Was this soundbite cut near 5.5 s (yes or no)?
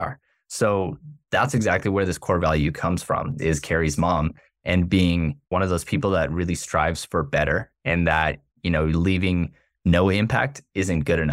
yes